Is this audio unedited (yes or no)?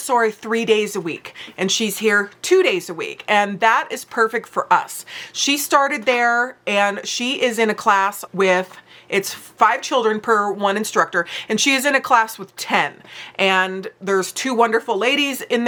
yes